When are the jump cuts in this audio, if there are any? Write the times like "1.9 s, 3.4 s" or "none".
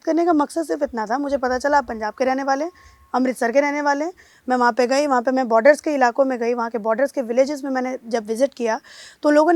none